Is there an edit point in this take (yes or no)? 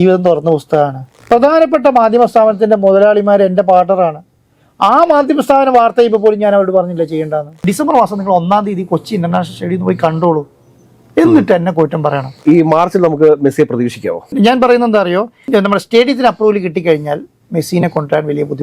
yes